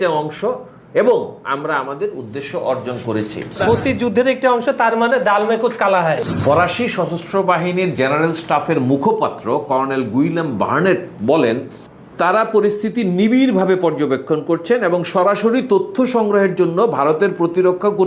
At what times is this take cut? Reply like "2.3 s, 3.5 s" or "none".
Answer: 3.6 s, 6.2 s